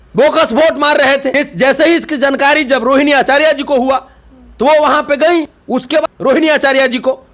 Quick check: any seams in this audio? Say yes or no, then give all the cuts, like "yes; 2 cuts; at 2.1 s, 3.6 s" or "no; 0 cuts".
yes; 2 cuts; at 1.3 s, 6.0 s